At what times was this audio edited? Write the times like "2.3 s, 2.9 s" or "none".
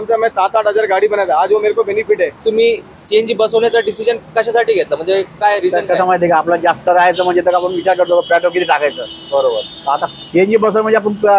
2.4 s